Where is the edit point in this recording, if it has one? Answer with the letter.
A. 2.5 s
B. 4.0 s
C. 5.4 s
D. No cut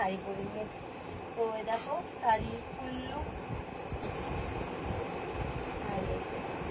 B